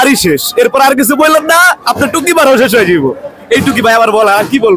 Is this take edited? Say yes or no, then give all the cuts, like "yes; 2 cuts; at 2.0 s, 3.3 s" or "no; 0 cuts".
no; 0 cuts